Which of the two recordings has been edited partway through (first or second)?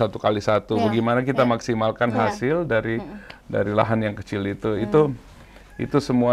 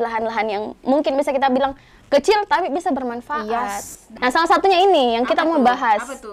second